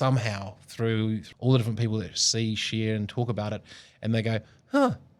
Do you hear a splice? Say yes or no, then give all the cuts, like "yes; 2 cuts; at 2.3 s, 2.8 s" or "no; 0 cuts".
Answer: yes; 1 cut; at 1.3 s